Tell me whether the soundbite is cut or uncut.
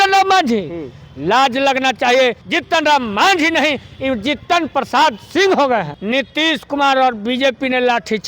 cut